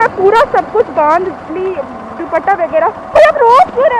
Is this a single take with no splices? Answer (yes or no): yes